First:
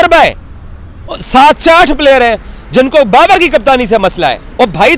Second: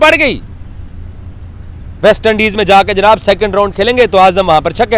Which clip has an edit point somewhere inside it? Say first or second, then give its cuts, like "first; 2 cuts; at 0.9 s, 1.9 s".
first; 1 cut; at 1.2 s